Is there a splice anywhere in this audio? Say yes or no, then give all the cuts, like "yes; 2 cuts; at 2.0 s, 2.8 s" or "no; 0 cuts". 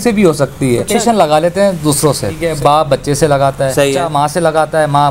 yes; 3 cuts; at 0.9 s, 2.4 s, 4.1 s